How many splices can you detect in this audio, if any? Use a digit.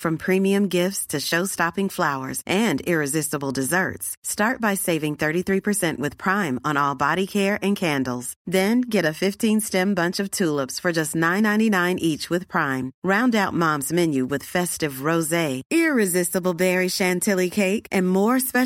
0